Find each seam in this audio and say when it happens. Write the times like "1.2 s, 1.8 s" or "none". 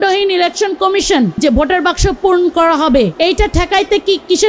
1.4 s, 3.1 s